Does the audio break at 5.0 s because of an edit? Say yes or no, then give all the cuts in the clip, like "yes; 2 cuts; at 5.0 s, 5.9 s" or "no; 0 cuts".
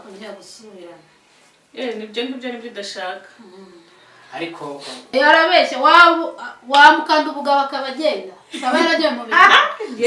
yes; 1 cut; at 5.0 s